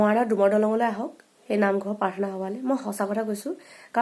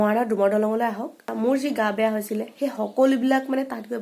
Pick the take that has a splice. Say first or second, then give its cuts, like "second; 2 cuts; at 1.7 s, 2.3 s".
second; 1 cut; at 1.2 s